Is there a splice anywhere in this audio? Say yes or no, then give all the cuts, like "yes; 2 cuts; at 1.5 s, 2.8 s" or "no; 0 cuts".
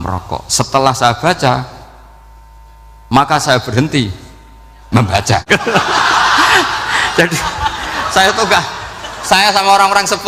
yes; 1 cut; at 5.4 s